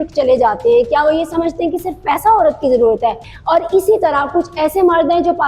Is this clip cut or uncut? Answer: cut